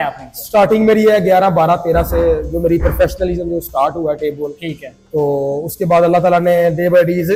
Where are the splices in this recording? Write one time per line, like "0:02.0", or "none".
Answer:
none